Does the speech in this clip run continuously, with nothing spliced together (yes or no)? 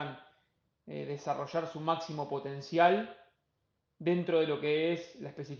yes